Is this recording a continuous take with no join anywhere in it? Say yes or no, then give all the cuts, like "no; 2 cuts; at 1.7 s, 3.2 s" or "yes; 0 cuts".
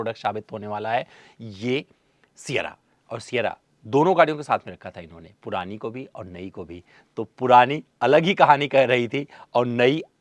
yes; 0 cuts